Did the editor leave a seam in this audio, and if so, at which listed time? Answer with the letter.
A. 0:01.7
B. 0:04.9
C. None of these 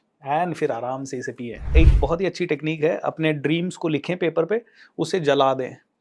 A